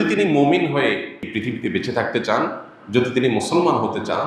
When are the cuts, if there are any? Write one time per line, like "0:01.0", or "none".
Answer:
0:01.2